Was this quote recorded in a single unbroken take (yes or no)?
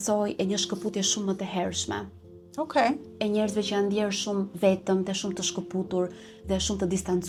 yes